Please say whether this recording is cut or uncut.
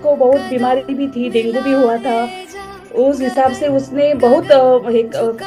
uncut